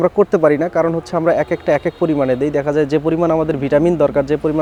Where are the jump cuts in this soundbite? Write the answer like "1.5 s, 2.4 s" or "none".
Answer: none

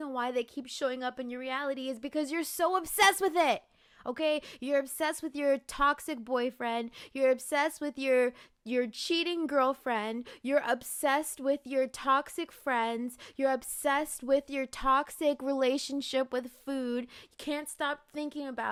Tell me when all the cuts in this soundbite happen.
none

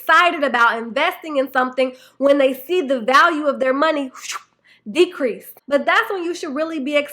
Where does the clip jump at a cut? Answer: 5.5 s

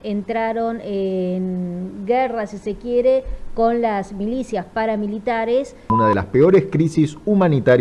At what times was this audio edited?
5.9 s

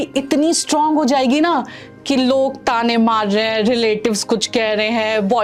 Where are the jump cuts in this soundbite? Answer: none

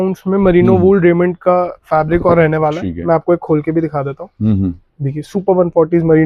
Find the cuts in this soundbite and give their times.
none

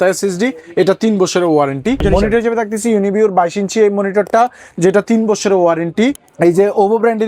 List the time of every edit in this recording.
2.0 s, 6.2 s

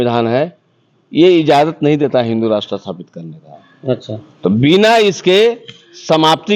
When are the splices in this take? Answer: none

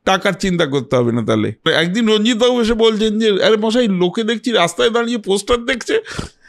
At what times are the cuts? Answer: 1.7 s

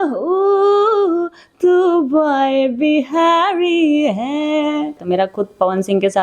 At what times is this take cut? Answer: 5.0 s

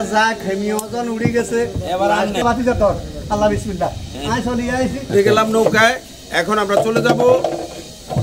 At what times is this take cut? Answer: 2.4 s, 5.0 s

